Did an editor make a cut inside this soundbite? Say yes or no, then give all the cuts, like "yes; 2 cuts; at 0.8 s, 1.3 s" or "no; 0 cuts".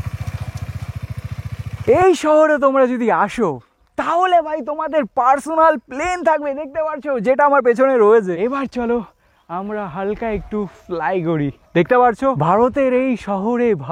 yes; 3 cuts; at 1.8 s, 8.4 s, 12.4 s